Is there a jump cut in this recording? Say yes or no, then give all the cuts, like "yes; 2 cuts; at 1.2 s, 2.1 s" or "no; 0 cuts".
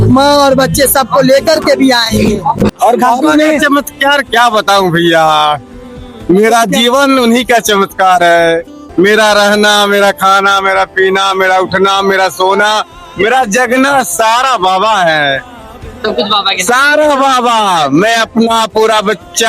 yes; 1 cut; at 2.7 s